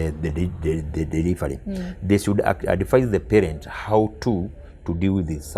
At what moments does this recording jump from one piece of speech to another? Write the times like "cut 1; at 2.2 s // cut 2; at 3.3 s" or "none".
none